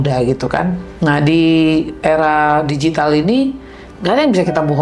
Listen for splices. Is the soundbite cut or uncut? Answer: uncut